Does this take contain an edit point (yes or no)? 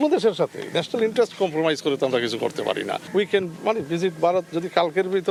no